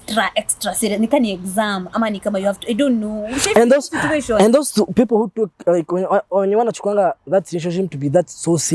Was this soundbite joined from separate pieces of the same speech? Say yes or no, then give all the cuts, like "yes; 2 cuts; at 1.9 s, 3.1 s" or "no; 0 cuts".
no; 0 cuts